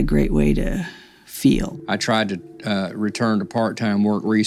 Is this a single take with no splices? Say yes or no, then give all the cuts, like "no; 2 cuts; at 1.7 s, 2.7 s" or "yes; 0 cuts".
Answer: yes; 0 cuts